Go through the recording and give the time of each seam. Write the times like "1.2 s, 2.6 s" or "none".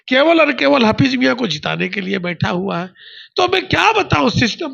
none